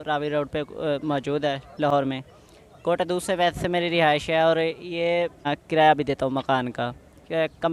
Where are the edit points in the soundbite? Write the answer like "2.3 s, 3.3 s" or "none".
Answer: 5.5 s